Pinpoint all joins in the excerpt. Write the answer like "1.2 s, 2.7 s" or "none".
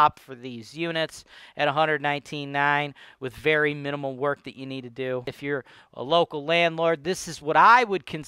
5.4 s